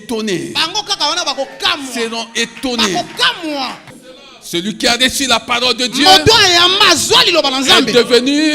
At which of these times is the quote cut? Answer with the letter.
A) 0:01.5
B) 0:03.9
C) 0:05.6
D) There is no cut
B